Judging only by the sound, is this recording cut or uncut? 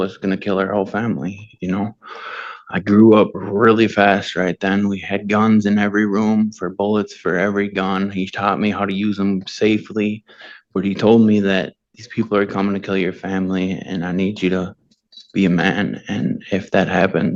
uncut